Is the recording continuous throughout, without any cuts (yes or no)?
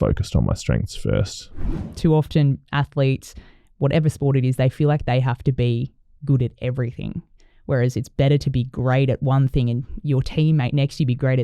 no